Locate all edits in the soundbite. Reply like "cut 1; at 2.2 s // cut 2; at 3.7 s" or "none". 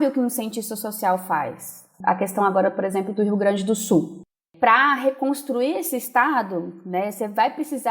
cut 1; at 1.9 s